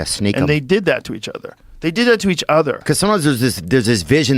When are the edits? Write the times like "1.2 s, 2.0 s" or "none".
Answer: 2.8 s